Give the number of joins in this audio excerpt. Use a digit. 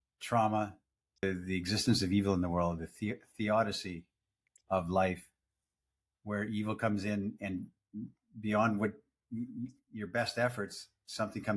1